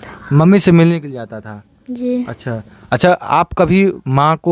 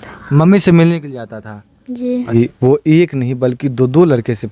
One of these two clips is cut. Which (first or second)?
second